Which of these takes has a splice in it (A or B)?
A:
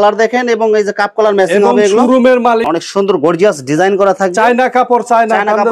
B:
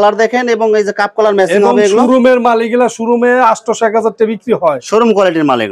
A